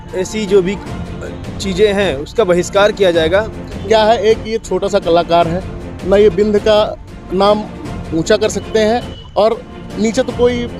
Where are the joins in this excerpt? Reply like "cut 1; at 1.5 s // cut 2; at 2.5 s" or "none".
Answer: cut 1; at 3.7 s